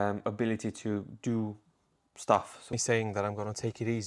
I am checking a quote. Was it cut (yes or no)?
yes